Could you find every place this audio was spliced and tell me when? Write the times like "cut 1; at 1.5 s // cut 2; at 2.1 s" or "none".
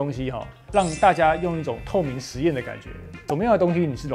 cut 1; at 3.2 s